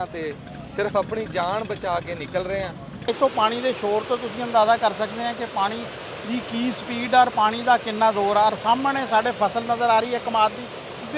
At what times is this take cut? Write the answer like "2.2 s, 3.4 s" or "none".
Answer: 3.1 s